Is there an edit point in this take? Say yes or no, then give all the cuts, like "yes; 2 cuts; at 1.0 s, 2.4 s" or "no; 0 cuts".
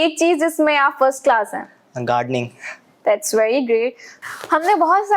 no; 0 cuts